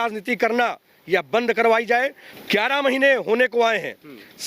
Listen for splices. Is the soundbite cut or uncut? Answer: cut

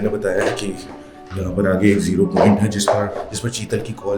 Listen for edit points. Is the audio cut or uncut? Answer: uncut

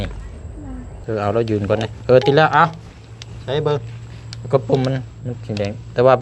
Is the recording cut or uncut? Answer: cut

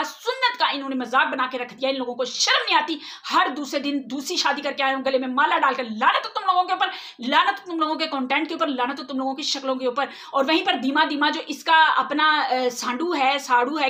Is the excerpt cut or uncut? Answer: uncut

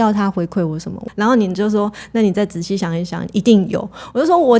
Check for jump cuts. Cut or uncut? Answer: uncut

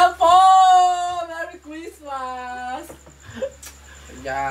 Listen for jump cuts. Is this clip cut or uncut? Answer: uncut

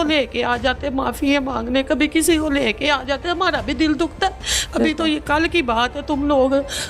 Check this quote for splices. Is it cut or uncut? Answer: uncut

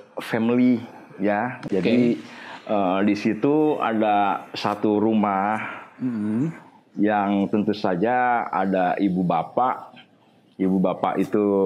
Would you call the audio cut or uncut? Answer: uncut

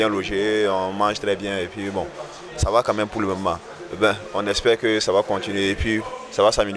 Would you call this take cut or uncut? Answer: uncut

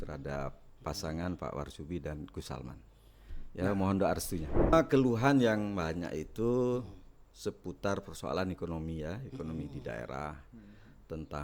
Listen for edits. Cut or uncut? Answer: cut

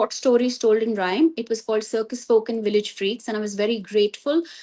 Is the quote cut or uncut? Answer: uncut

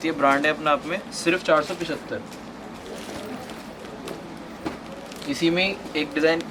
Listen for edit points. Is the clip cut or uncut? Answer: uncut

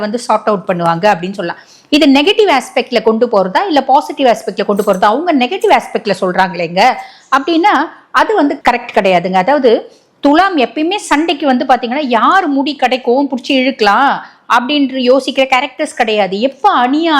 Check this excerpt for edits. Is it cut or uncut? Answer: uncut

